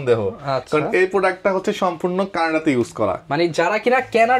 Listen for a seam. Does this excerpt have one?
no; 0 cuts

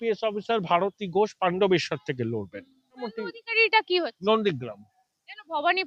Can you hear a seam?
yes; 1 cut; at 3.1 s

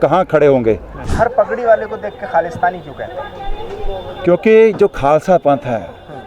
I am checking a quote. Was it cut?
yes; 1 cut; at 1.0 s

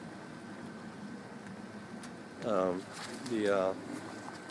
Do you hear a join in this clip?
no; 0 cuts

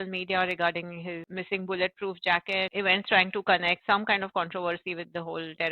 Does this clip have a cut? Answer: yes; 3 cuts; at 1.3 s, 2.7 s, 3.8 s

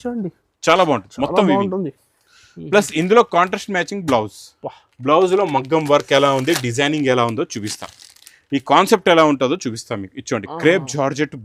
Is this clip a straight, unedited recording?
yes; 0 cuts

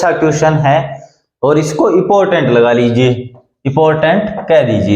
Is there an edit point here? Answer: no; 0 cuts

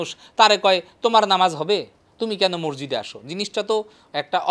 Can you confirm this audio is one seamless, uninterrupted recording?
yes; 0 cuts

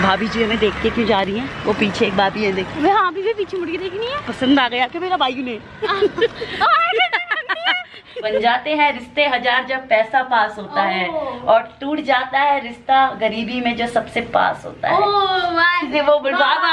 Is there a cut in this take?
yes; 2 cuts; at 8.3 s, 15.9 s

